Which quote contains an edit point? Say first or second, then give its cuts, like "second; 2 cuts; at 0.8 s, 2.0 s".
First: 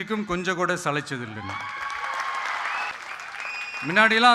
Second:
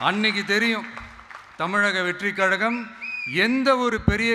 first; 1 cut; at 2.9 s